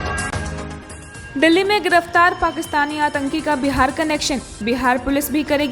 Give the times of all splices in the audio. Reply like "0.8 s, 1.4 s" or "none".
1.1 s